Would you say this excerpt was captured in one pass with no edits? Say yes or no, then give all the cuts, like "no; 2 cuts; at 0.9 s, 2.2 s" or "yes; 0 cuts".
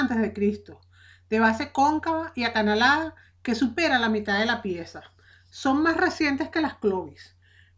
no; 1 cut; at 4.3 s